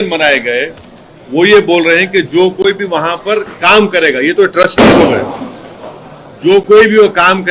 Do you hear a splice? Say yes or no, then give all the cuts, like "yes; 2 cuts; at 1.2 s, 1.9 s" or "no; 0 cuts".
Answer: no; 0 cuts